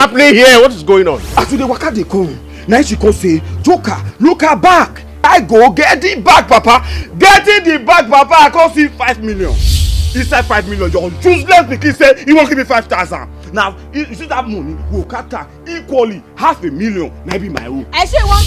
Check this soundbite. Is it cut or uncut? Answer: cut